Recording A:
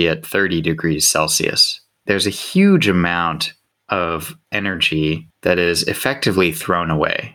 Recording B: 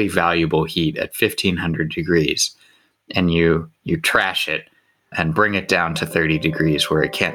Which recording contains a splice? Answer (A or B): A